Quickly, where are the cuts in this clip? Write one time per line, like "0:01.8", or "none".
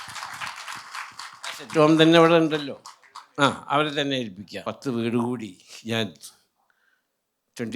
0:04.5